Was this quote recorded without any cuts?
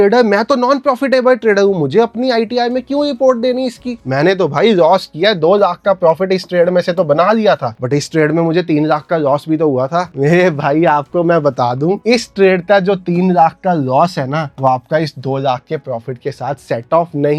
yes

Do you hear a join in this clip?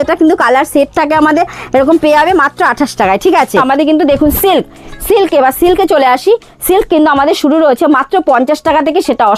yes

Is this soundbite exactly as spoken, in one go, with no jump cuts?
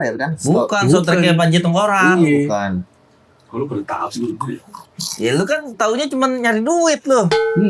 yes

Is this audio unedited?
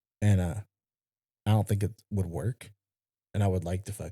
yes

